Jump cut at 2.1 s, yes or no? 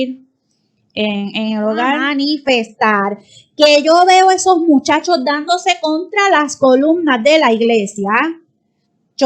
yes